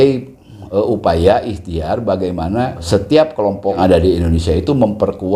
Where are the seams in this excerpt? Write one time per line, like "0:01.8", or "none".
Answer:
0:02.8
0:03.8